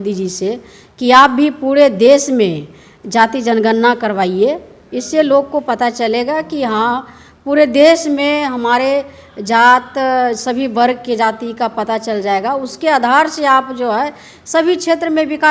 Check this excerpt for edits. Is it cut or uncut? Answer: uncut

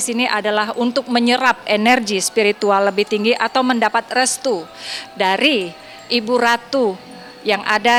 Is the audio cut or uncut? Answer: uncut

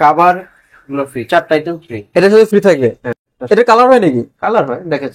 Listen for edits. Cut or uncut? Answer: uncut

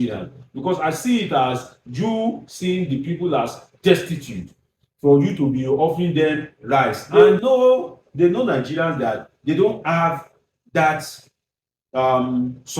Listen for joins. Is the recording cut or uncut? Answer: cut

